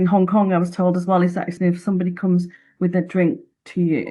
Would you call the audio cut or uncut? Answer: cut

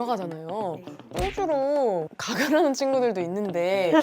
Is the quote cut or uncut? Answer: cut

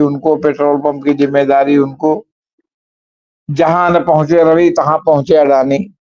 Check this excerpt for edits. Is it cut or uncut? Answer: uncut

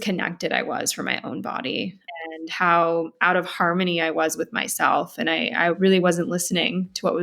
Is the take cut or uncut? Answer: cut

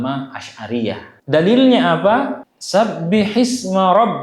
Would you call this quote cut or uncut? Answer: cut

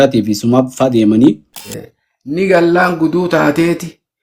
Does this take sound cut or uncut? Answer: cut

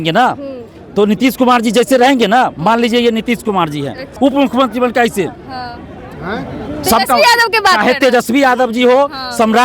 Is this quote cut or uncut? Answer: cut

